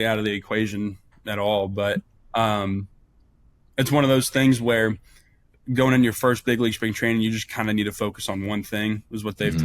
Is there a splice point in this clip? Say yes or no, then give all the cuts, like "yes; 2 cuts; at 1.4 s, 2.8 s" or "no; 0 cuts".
no; 0 cuts